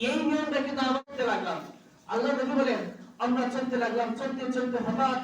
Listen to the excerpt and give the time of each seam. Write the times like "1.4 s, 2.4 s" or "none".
1.1 s